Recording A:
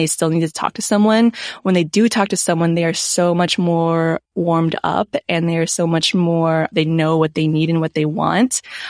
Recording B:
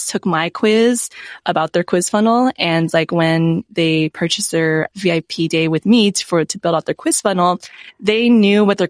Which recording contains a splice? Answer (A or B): B